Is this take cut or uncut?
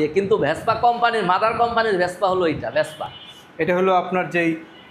uncut